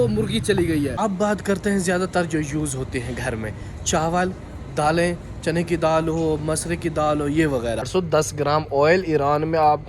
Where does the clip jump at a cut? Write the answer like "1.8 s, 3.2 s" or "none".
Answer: 0.9 s, 7.9 s

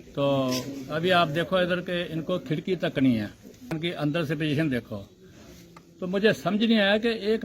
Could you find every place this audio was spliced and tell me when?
3.8 s

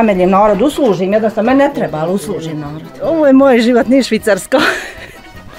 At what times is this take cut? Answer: 3.1 s

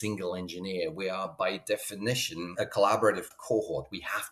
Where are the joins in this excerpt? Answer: 2.5 s, 3.3 s

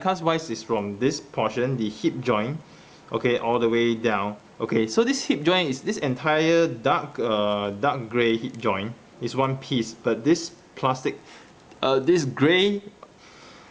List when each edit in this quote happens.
3.0 s

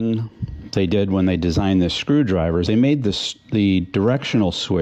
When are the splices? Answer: none

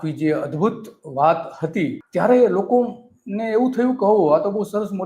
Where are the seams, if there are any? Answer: 2.0 s

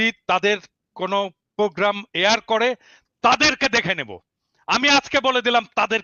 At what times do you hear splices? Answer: none

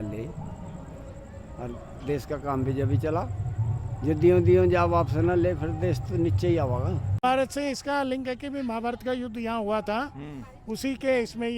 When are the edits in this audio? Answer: 7.2 s

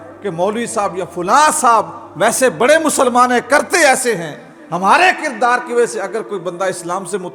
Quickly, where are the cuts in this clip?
none

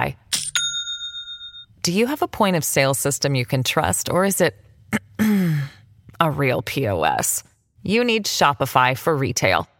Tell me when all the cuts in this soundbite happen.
none

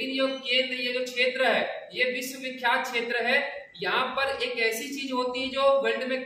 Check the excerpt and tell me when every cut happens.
none

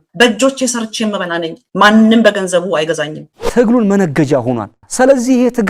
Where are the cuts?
3.3 s

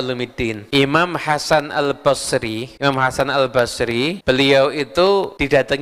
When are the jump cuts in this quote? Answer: none

